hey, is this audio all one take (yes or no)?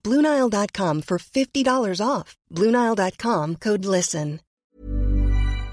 no